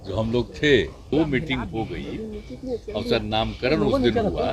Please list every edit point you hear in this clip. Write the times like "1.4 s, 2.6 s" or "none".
1.0 s